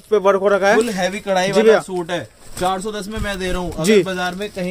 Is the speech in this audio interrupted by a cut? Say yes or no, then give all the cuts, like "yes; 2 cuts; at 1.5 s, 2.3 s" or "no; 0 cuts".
no; 0 cuts